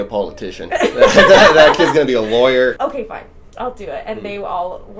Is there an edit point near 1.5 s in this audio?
no; 1 cut; at 2.8 s

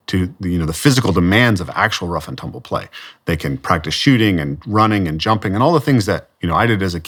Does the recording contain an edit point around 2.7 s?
no; 0 cuts

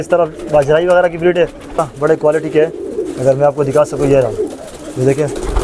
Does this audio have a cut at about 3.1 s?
no; 1 cut; at 1.7 s

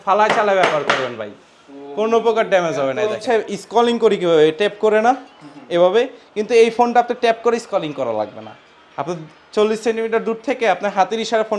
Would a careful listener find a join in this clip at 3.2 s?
yes; 1 cut; at 3.2 s

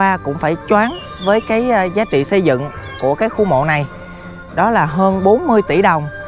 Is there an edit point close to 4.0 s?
no; 0 cuts

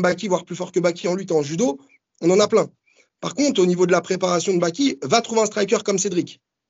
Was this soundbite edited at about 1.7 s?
no; 0 cuts

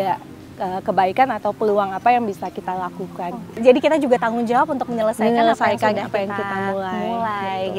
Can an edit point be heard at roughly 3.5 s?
yes; 1 cut; at 3.5 s

